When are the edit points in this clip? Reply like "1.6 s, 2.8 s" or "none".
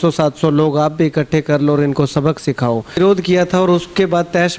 3.0 s